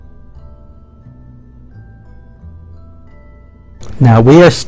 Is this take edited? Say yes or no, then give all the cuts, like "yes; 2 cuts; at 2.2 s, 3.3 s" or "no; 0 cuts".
no; 0 cuts